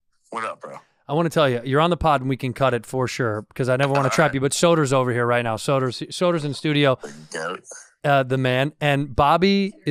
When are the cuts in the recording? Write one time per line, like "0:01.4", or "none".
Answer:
none